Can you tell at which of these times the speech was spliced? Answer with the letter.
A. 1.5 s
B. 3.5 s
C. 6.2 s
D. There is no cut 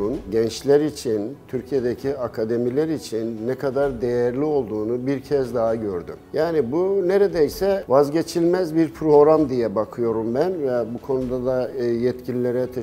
C